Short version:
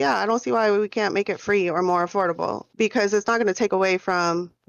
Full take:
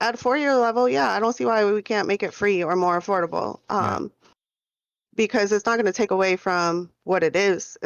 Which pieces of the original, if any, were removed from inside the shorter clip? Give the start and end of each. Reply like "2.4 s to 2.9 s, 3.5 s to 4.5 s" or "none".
3.6 s to 5.0 s

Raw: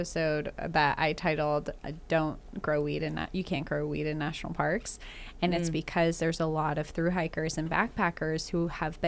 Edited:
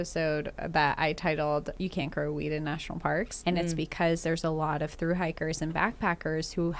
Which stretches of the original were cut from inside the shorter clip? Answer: 1.7 s to 3.3 s, 4.9 s to 5.3 s

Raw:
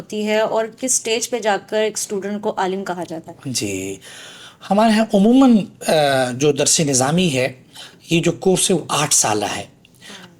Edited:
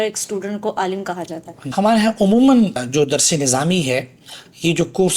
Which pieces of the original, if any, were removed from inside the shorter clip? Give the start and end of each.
3.4 s to 4.5 s, 5.8 s to 6.3 s

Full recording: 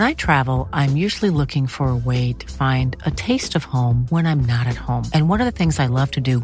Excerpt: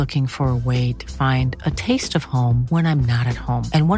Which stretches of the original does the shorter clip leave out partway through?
none

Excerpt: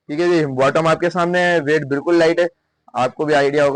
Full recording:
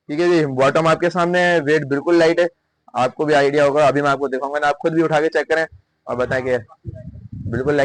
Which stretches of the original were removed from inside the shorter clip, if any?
none

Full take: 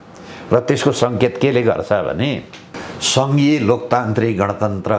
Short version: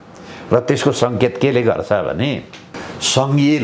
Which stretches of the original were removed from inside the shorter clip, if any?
none

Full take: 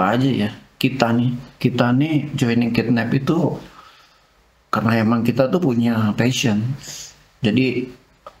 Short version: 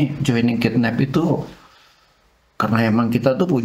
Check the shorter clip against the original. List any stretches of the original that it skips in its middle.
none

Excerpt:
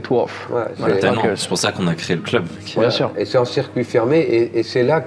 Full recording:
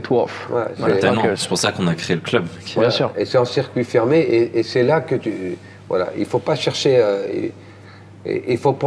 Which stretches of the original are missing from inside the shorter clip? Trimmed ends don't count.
none

